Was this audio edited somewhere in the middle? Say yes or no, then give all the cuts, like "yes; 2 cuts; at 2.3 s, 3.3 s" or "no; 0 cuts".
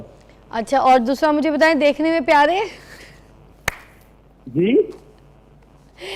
no; 0 cuts